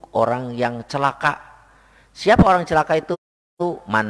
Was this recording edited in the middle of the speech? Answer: no; 0 cuts

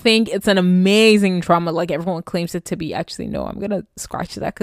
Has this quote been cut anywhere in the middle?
no; 0 cuts

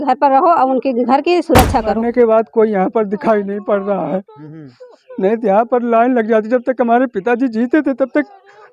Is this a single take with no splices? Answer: no; 1 cut; at 1.9 s

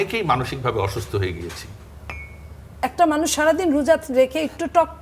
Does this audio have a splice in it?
yes; 1 cut; at 2.8 s

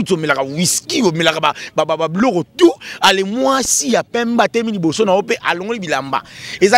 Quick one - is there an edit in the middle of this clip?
no; 0 cuts

